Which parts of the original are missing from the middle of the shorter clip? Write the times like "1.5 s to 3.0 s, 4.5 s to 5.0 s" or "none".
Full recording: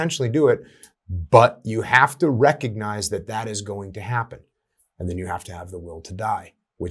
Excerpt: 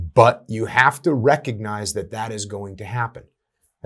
none